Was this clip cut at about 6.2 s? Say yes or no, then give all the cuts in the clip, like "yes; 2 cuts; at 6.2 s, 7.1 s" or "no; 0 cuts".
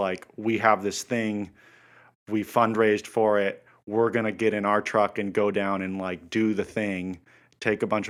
no; 0 cuts